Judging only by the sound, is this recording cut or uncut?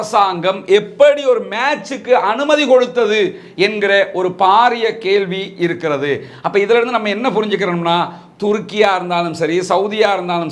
uncut